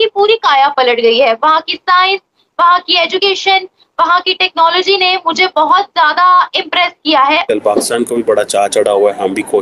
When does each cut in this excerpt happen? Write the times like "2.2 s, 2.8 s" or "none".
7.4 s